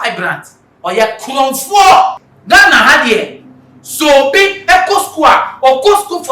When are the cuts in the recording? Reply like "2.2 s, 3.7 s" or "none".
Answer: 2.3 s